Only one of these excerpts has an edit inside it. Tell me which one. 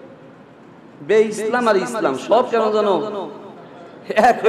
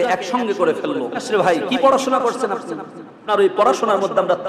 second; 2 cuts; at 1.2 s, 3.2 s

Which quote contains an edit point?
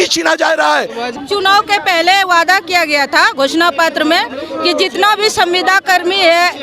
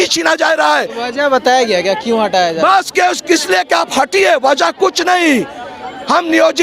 first; 1 cut; at 1.1 s

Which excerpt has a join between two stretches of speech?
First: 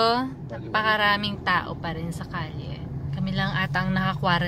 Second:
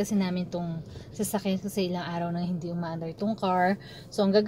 first; 1 cut; at 3.0 s

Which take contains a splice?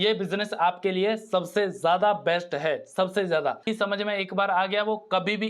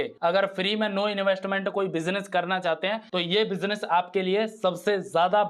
first; 1 cut; at 3.6 s

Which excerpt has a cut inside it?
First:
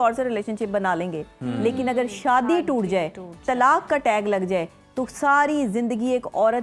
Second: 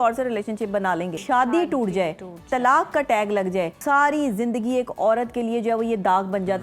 second; 2 cuts; at 1.2 s, 3.8 s

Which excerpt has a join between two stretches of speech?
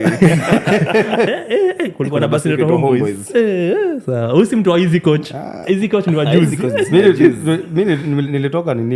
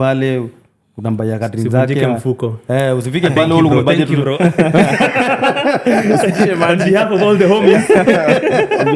first; 1 cut; at 1.3 s

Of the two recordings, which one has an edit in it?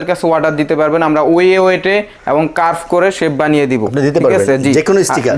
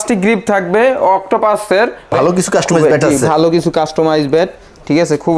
second; 1 cut; at 2.1 s

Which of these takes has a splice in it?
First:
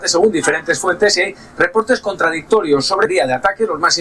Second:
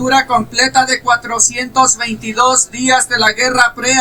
first; 1 cut; at 3.1 s

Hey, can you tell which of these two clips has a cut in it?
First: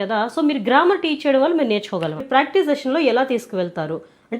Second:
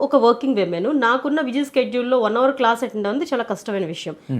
first; 1 cut; at 2.2 s

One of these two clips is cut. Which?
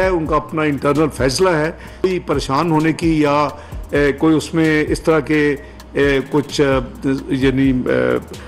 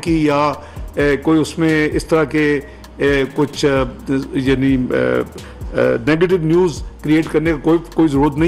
first; 1 cut; at 2.0 s

